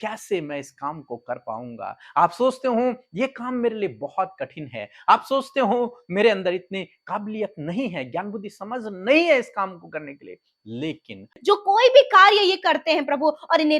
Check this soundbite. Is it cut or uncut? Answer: cut